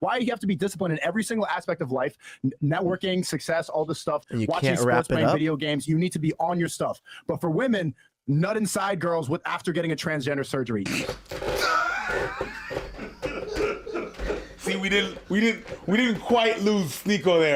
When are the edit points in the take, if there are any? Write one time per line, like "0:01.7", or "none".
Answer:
none